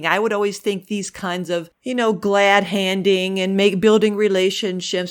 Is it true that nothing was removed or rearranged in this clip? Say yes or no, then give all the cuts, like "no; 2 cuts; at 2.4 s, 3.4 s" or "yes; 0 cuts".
no; 1 cut; at 1.7 s